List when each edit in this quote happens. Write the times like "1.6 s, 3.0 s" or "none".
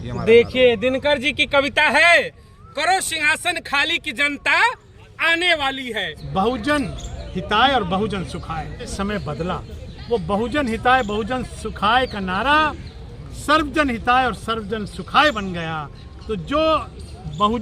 6.1 s, 8.9 s